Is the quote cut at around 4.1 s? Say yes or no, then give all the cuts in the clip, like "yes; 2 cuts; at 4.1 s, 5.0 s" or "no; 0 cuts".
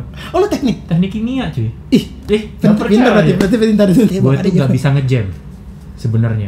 yes; 1 cut; at 4.1 s